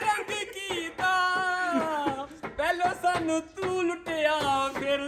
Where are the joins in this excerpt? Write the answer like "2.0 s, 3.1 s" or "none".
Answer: none